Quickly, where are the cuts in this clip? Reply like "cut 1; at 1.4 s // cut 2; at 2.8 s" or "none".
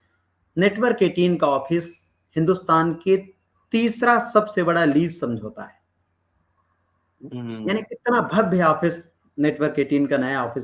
none